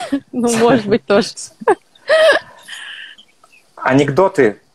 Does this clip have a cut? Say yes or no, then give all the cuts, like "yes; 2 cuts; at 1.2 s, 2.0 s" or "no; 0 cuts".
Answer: yes; 1 cut; at 3.1 s